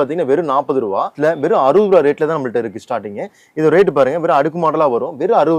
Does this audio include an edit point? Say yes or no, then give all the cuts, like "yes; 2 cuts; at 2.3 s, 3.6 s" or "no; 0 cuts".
yes; 1 cut; at 1.1 s